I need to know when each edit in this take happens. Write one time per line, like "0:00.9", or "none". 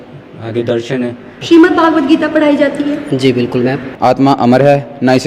0:01.3
0:03.9